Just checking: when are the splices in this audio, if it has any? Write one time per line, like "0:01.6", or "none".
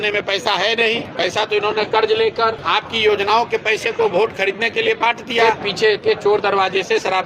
0:01.1
0:02.6
0:05.5